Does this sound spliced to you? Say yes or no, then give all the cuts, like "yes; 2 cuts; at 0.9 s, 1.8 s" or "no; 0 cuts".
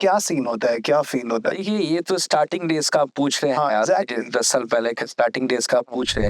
no; 0 cuts